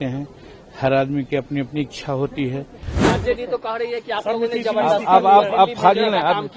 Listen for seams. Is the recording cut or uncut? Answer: cut